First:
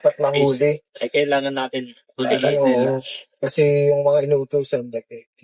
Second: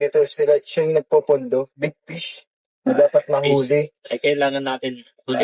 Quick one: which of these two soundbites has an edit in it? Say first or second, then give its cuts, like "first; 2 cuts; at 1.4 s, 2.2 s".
first; 1 cut; at 4.0 s